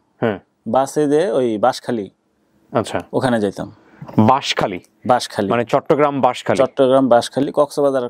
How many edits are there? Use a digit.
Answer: 0